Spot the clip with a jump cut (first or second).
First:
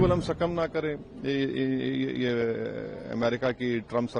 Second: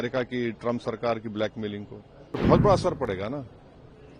second